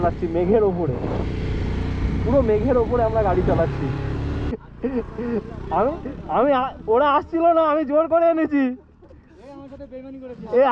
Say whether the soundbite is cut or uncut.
cut